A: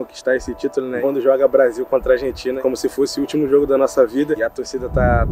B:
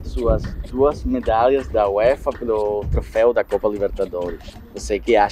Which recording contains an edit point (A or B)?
A